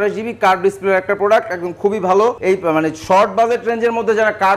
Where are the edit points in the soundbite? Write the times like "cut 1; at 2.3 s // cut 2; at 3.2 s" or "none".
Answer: cut 1; at 2.4 s